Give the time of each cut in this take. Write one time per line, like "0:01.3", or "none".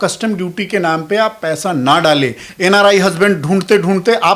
0:02.5